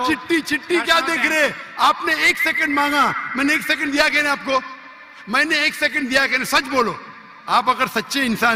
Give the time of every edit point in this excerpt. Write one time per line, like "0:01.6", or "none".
none